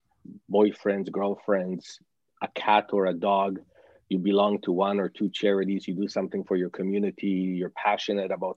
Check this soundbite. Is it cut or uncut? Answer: uncut